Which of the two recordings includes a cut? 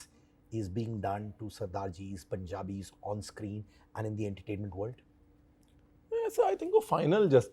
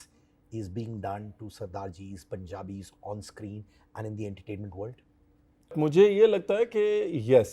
second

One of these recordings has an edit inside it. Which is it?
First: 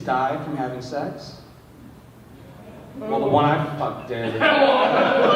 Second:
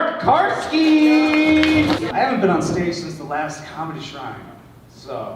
second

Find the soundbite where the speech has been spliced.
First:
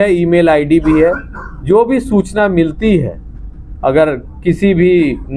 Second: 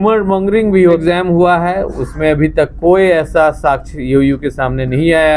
second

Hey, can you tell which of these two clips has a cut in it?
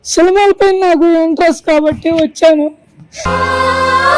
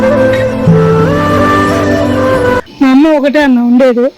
second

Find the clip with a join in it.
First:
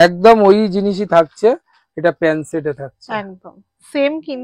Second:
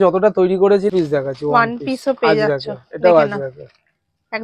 second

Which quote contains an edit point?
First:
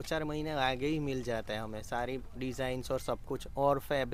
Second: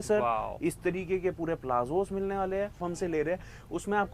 second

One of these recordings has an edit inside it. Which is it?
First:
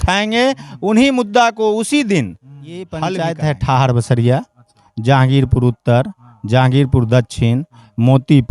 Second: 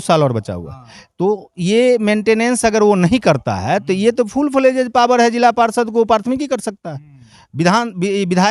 first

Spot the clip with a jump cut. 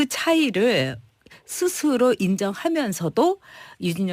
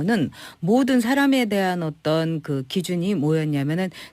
second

